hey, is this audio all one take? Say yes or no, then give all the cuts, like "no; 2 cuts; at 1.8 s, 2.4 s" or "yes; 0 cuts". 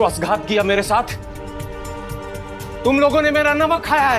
yes; 0 cuts